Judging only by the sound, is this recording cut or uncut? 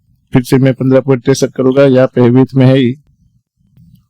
uncut